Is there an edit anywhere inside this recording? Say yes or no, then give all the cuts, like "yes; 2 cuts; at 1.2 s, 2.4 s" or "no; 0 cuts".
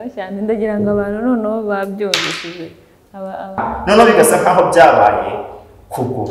yes; 1 cut; at 3.7 s